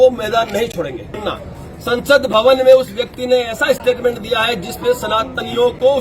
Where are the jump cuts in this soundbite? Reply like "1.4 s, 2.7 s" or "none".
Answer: 1.1 s